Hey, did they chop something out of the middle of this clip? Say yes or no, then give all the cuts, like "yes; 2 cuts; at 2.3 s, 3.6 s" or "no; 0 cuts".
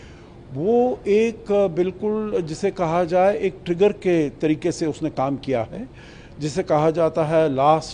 no; 0 cuts